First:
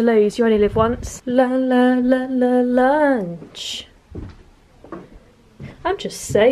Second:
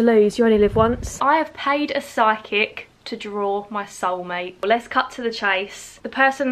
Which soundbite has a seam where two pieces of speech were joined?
second; 2 cuts; at 1.1 s, 4.6 s

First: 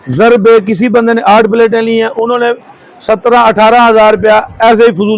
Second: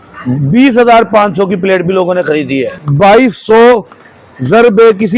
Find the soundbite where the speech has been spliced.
second; 1 cut; at 2.8 s

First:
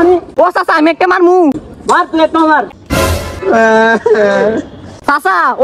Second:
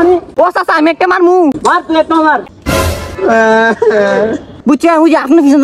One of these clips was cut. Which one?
second; 2 cuts; at 1.6 s, 4.5 s

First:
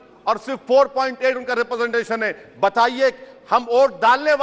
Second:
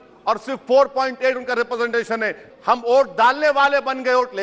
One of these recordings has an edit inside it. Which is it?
second; 1 cut; at 2.4 s

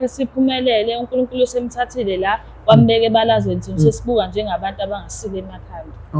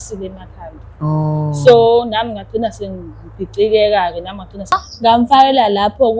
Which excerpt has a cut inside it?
second; 1 cut; at 4.7 s

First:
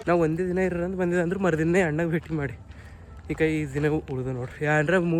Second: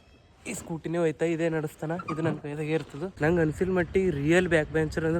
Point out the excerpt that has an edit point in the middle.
second; 1 cut; at 3.0 s

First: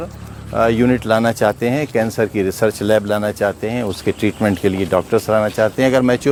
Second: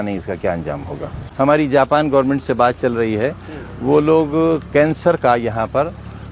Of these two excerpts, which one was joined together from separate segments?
second; 1 cut; at 1.2 s

